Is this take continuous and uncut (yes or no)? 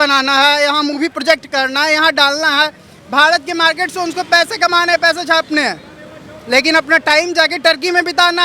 yes